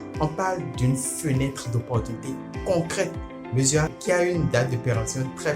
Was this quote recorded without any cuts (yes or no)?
no